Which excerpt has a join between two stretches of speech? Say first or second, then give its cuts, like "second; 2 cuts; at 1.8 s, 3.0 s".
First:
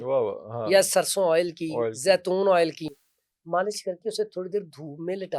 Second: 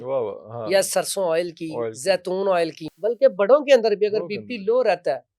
second; 1 cut; at 2.8 s